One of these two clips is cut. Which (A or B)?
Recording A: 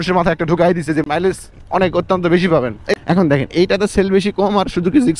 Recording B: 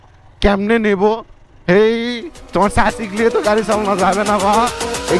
A